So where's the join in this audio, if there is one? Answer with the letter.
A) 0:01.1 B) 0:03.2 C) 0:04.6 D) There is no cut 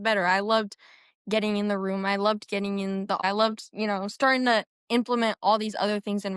B